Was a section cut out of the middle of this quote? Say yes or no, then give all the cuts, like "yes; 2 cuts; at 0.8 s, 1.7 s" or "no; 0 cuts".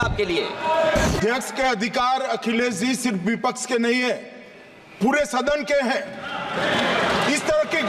yes; 1 cut; at 1.1 s